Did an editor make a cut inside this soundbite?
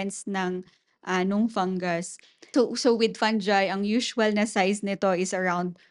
yes; 1 cut; at 2.5 s

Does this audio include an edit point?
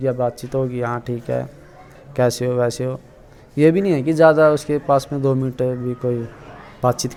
no; 0 cuts

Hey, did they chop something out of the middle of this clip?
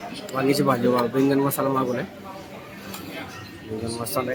no; 0 cuts

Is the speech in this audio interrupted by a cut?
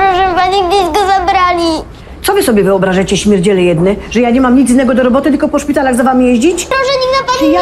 yes; 1 cut; at 6.7 s

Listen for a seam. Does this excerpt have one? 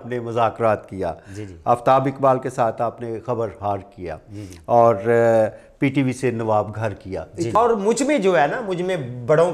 yes; 1 cut; at 7.5 s

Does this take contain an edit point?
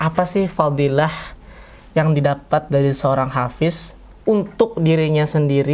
no; 0 cuts

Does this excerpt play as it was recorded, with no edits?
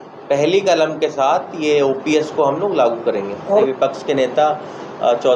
no; 1 cut; at 3.7 s

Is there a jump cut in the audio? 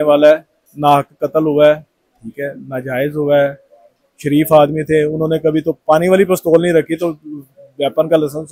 no; 0 cuts

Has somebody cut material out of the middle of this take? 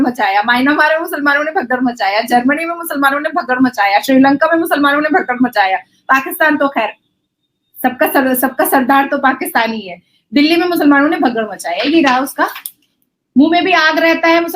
no; 0 cuts

